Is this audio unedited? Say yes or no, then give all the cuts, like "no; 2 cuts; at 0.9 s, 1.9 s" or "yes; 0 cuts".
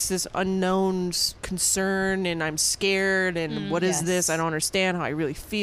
yes; 0 cuts